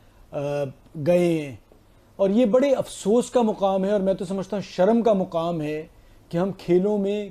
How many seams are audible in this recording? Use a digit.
0